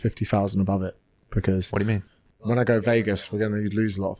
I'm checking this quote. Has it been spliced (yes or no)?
no